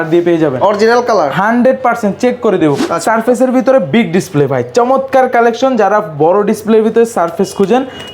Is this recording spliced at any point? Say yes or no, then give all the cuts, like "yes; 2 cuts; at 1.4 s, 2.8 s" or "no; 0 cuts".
yes; 1 cut; at 2.8 s